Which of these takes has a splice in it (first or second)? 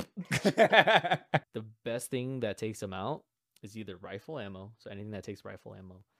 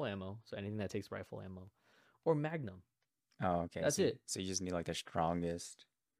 first